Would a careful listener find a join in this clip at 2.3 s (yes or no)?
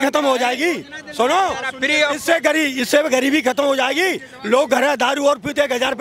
no